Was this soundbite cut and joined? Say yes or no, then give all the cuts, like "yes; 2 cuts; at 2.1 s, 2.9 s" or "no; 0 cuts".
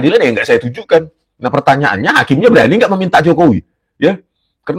no; 0 cuts